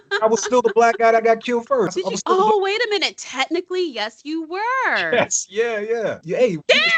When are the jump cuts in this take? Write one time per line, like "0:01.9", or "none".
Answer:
0:01.9
0:06.2